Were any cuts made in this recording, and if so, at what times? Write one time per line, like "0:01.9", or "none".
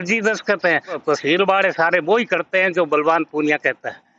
0:01.0